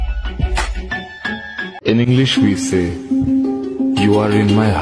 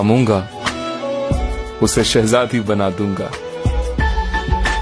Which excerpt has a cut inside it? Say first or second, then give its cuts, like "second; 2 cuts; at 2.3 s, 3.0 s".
first; 1 cut; at 1.8 s